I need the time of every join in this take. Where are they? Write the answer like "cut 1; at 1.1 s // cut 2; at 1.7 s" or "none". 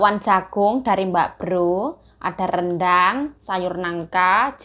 none